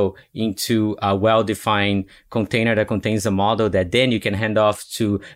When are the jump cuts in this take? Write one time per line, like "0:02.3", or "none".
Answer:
none